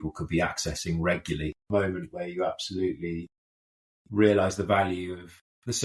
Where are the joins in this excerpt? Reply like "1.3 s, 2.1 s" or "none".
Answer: 1.7 s